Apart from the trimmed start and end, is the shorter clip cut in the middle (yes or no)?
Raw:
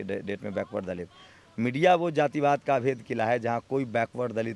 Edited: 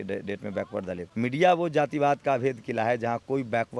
yes